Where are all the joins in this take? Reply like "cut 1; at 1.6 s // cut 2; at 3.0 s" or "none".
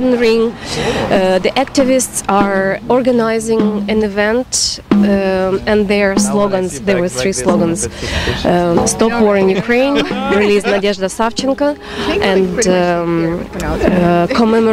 none